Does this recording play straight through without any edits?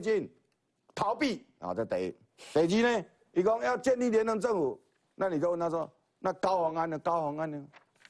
yes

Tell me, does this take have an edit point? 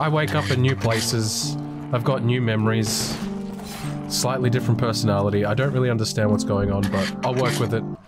no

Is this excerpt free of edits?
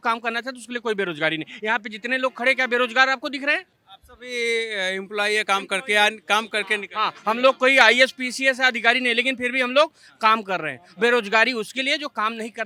yes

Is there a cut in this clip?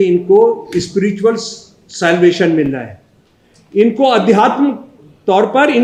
no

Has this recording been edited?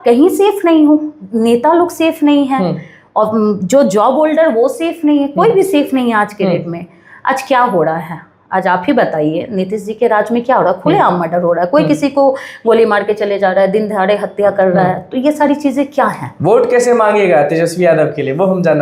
no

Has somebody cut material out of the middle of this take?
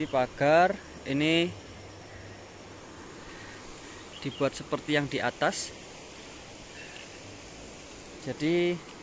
no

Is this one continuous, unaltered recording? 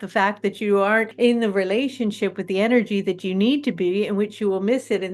no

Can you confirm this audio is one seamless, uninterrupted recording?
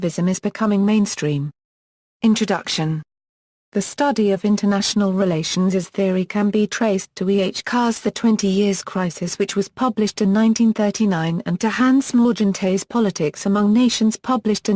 no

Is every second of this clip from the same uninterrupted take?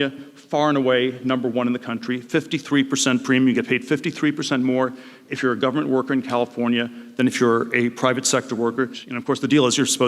yes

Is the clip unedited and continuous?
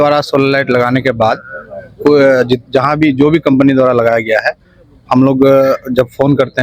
yes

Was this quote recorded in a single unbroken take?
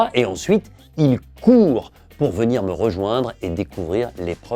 yes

